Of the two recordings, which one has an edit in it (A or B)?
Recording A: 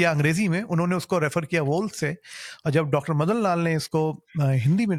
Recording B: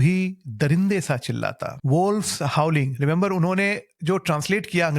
B